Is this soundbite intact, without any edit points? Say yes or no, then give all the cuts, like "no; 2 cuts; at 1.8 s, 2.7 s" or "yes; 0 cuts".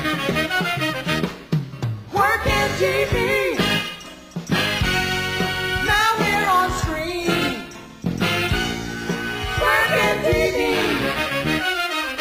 yes; 0 cuts